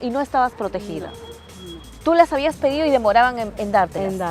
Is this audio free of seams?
yes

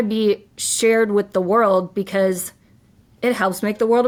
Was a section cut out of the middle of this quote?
no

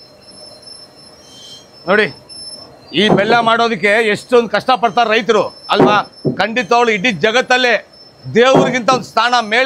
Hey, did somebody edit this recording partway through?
no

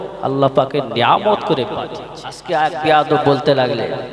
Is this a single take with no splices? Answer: no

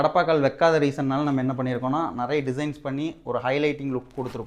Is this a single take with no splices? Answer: yes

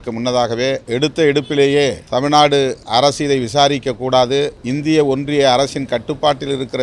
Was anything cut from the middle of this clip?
yes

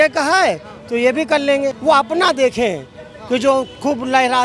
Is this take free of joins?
no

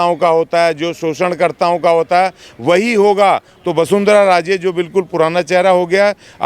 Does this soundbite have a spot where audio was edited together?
yes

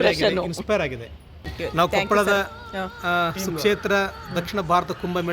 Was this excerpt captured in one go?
no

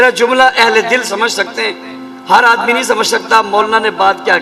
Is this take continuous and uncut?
yes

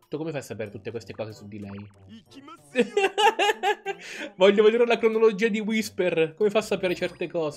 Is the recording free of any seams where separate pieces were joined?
yes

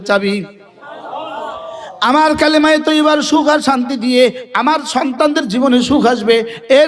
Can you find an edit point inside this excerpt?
no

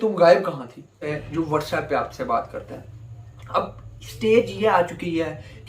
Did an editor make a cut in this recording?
yes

